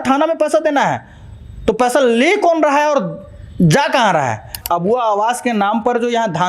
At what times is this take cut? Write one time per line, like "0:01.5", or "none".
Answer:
0:04.6